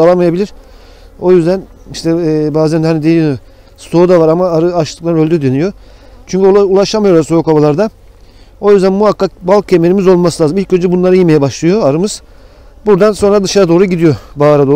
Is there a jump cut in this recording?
no; 0 cuts

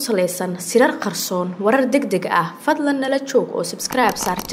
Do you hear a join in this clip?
no; 0 cuts

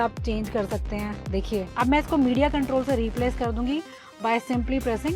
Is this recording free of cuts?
no; 1 cut; at 1.7 s

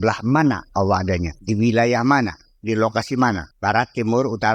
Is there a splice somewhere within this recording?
yes; 2 cuts; at 1.3 s, 3.5 s

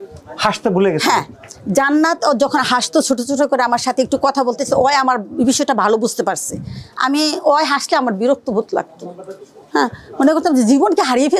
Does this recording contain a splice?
no; 0 cuts

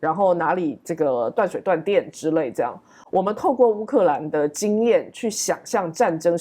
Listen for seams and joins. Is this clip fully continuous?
yes; 0 cuts

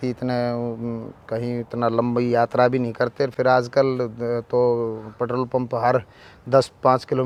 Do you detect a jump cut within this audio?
no; 0 cuts

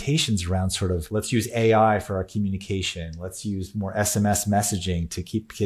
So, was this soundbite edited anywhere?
yes; 1 cut; at 1.1 s

